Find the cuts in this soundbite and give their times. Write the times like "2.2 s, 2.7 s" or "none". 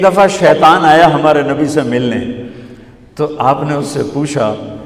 none